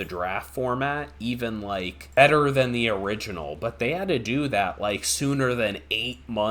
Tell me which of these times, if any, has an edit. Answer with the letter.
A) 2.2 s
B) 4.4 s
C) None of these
A